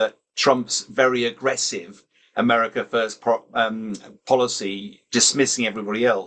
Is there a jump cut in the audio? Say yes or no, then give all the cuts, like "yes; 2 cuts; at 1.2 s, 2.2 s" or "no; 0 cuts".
no; 0 cuts